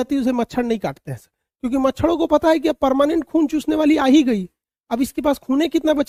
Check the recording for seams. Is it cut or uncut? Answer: uncut